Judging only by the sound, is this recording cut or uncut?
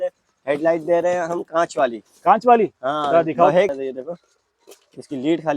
cut